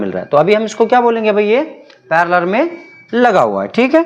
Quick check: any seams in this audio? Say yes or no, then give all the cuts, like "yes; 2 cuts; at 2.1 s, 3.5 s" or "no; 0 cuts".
no; 0 cuts